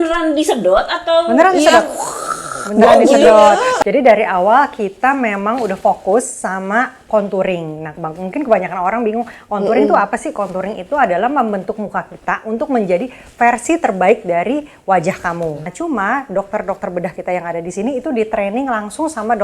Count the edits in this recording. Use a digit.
2